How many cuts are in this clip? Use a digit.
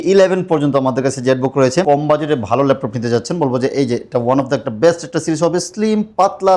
1